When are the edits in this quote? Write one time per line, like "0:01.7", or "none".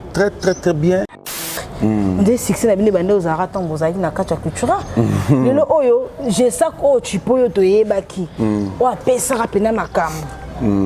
0:01.2